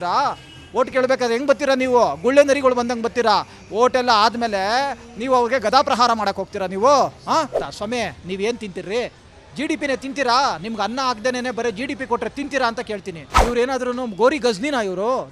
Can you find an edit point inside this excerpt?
yes; 2 cuts; at 7.6 s, 13.3 s

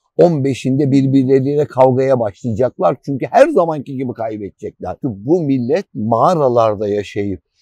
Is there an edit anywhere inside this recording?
yes; 1 cut; at 5.0 s

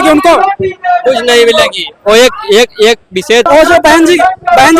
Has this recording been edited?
yes; 1 cut; at 3.5 s

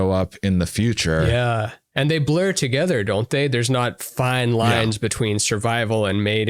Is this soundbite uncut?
yes; 0 cuts

